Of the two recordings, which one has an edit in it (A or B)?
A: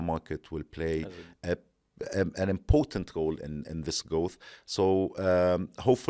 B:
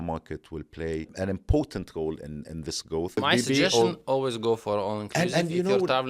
B